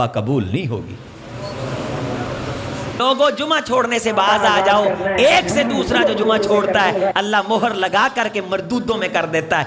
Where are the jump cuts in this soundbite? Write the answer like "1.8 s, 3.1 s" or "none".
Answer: 3.0 s